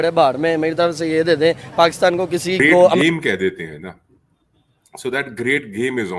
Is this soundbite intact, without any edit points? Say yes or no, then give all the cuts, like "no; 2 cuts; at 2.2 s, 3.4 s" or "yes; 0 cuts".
no; 1 cut; at 3.0 s